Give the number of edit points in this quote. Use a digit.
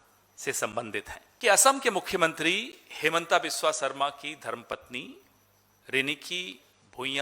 1